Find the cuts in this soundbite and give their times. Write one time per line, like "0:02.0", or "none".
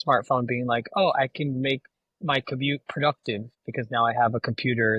0:03.6